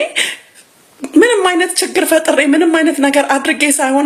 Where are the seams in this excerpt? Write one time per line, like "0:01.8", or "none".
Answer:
none